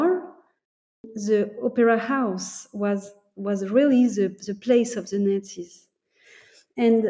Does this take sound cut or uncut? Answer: cut